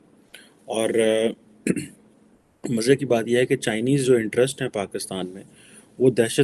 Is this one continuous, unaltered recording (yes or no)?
yes